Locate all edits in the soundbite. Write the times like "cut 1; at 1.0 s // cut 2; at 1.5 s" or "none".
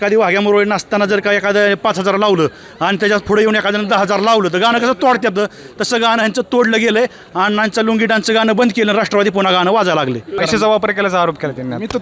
cut 1; at 10.4 s